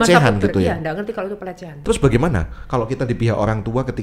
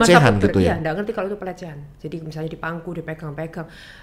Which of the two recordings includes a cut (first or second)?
first